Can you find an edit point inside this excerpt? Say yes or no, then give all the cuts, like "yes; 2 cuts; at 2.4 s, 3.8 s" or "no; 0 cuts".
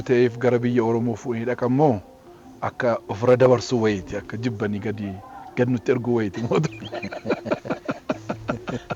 no; 0 cuts